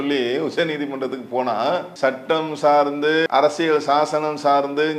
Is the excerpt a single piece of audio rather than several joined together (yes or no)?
no